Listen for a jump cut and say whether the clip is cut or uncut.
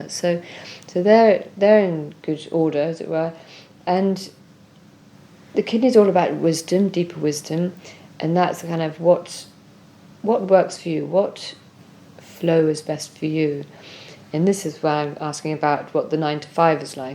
uncut